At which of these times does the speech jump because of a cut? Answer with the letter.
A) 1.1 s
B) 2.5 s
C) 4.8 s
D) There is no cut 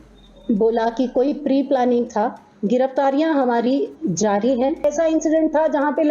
C